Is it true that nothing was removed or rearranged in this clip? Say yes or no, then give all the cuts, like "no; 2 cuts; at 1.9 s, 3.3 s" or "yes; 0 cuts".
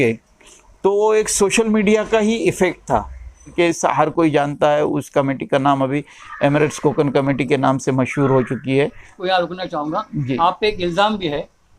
no; 2 cuts; at 3.5 s, 9.2 s